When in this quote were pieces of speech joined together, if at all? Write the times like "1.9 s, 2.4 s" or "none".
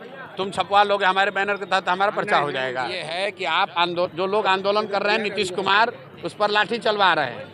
3.1 s